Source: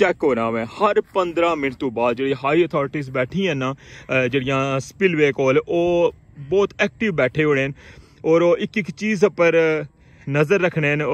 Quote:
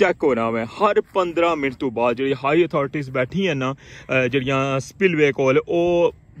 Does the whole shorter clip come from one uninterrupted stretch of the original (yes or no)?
yes